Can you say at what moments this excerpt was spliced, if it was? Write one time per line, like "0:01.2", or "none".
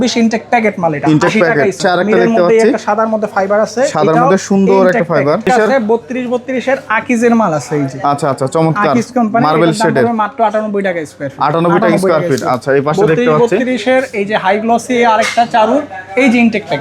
0:01.8
0:05.5